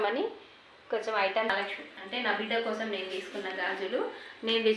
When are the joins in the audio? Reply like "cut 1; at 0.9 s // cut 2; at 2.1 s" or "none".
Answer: cut 1; at 1.5 s